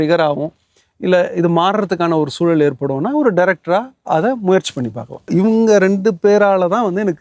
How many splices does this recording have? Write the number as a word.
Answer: one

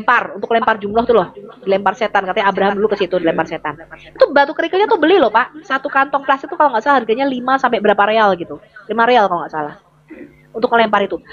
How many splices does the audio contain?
zero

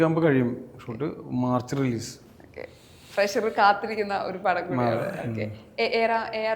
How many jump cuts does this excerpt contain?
zero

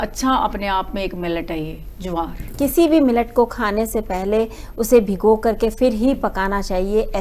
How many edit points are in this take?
one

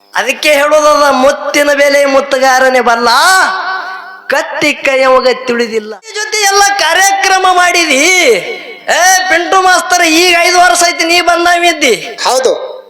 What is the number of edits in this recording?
one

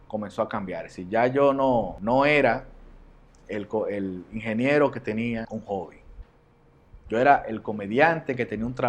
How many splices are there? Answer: two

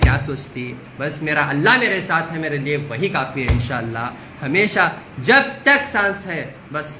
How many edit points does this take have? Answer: zero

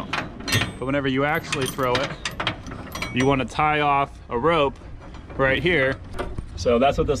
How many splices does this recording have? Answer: one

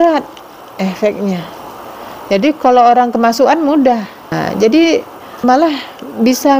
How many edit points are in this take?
two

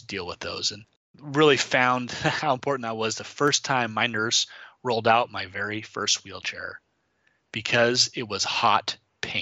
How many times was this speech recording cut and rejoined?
one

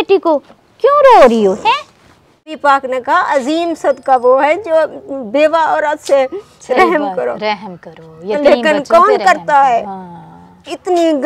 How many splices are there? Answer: one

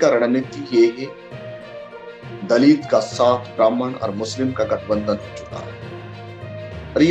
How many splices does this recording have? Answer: two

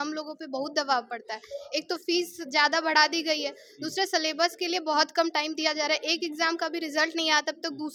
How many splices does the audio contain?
zero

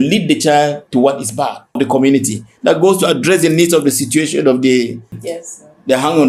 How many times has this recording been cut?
two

